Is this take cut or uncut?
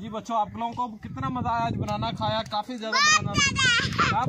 uncut